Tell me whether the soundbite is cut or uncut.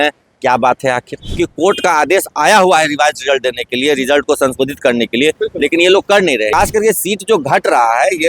cut